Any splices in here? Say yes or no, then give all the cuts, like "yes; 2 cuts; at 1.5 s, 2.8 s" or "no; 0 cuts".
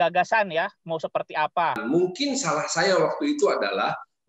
yes; 1 cut; at 1.8 s